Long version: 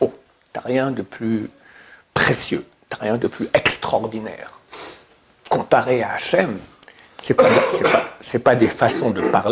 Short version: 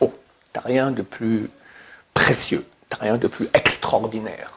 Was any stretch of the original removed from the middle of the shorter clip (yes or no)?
no